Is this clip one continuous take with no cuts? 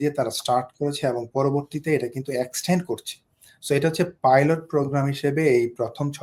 yes; 0 cuts

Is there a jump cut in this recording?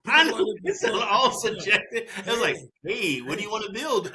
no; 0 cuts

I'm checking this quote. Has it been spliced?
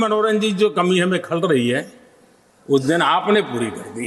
no; 0 cuts

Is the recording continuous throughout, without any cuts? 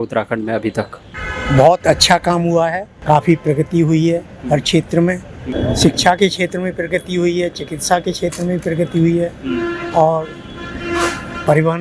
no; 2 cuts; at 2.9 s, 5.4 s

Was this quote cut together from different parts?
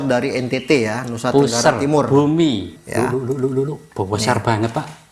yes; 1 cut; at 2.7 s

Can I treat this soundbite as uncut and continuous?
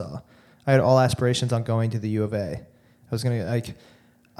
yes; 0 cuts

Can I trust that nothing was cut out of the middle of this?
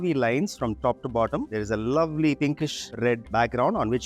yes; 0 cuts

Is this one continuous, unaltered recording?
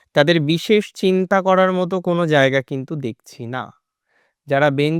yes; 0 cuts

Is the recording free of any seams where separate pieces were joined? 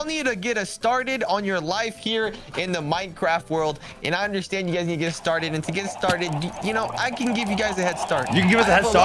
yes; 0 cuts

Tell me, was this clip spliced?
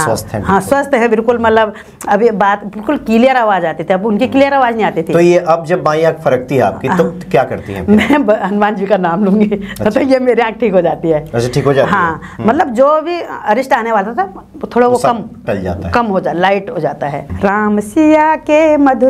yes; 1 cut; at 17.2 s

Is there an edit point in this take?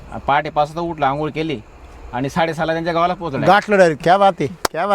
yes; 1 cut; at 4.0 s

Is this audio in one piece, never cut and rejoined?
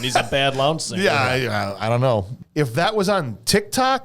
no; 1 cut; at 2.4 s

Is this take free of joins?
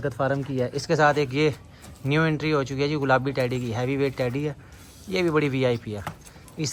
yes; 0 cuts

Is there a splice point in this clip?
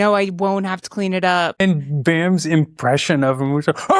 yes; 1 cut; at 1.6 s

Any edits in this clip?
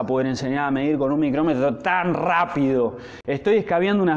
no; 0 cuts

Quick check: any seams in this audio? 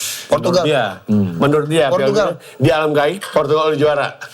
no; 0 cuts

